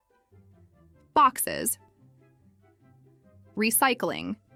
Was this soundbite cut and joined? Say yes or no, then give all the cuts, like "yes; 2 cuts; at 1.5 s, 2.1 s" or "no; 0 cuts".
no; 0 cuts